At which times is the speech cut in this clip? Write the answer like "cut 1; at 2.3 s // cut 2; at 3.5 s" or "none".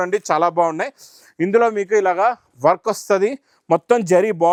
none